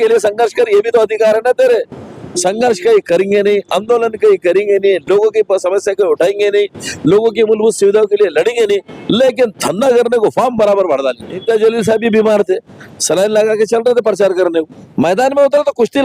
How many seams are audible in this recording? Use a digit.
2